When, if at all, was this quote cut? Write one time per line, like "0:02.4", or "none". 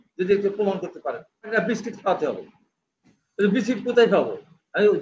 0:01.5